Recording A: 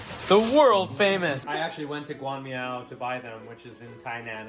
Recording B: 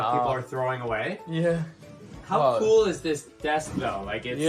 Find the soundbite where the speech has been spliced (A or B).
A